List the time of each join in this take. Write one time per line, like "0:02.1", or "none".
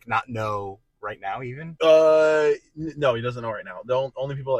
0:01.6

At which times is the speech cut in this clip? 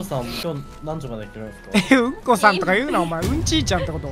none

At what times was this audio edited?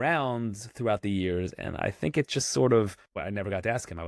0:03.2

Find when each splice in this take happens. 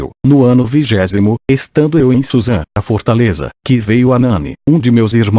none

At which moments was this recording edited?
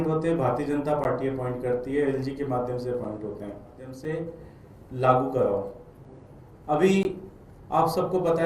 0:03.9

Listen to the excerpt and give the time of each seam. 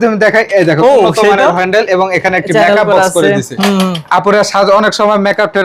none

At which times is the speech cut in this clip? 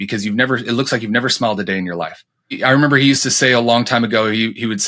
0:02.6

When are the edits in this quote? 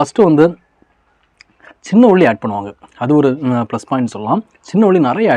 none

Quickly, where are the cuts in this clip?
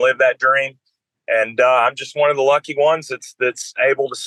none

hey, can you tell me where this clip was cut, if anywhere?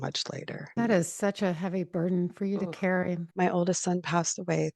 0:00.8
0:03.3

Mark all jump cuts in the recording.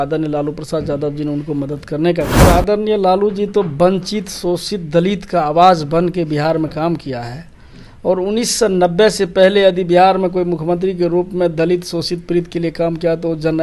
0:02.4

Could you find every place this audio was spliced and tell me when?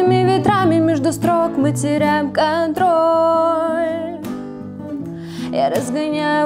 none

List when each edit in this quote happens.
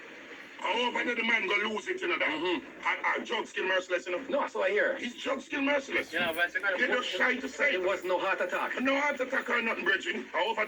0:03.5
0:09.1

